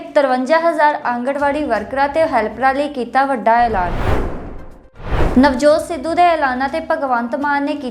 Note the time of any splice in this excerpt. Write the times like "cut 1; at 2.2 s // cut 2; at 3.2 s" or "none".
cut 1; at 3.9 s // cut 2; at 5.1 s